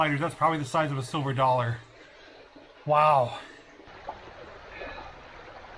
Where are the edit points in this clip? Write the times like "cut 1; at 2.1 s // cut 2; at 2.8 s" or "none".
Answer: cut 1; at 3.9 s